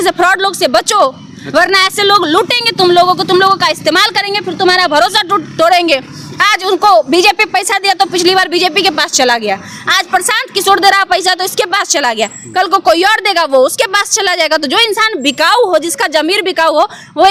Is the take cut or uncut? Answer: uncut